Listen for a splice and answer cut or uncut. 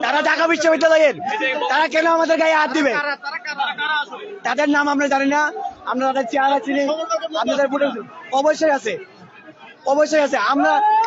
uncut